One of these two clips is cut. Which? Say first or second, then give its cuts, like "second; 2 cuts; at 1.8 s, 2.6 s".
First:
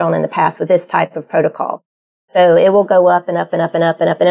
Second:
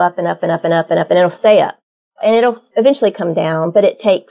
second; 1 cut; at 2.2 s